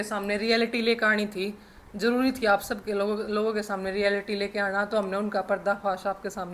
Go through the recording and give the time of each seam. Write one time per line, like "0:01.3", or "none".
none